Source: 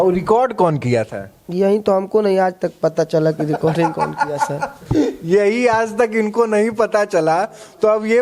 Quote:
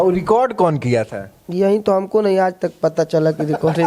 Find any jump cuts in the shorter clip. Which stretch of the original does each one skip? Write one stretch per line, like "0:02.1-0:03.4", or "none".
none